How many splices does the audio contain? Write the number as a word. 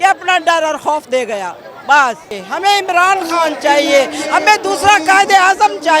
one